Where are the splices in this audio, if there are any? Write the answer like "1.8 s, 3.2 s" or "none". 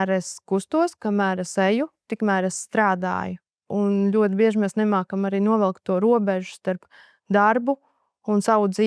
3.6 s